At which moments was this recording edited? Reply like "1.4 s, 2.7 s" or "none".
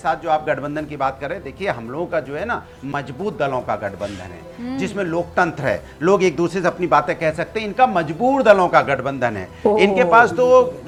none